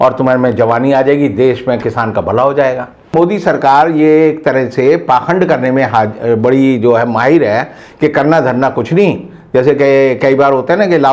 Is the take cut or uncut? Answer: cut